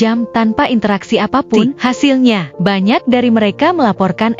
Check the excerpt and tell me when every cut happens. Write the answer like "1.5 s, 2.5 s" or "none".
1.7 s